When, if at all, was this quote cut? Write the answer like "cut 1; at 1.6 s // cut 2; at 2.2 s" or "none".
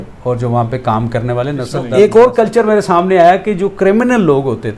cut 1; at 1.9 s